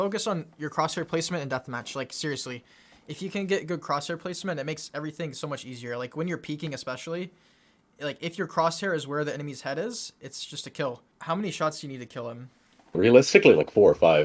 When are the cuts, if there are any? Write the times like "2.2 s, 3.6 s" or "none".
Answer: 11.1 s, 13.0 s